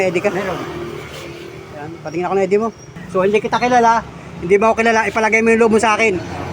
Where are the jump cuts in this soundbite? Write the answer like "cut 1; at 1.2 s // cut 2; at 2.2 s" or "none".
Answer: cut 1; at 2.9 s